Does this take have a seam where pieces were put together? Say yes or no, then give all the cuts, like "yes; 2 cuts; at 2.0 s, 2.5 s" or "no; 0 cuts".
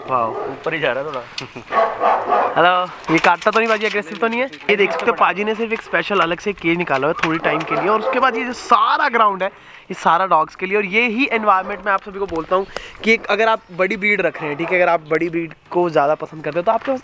no; 0 cuts